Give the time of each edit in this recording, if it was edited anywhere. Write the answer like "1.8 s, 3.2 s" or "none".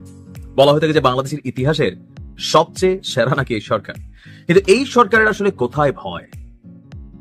6.2 s